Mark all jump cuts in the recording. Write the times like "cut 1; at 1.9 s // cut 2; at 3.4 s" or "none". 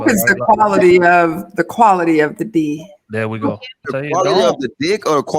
cut 1; at 3.8 s